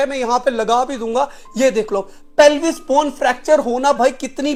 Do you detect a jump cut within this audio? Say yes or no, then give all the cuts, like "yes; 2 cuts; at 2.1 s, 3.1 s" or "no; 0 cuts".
no; 0 cuts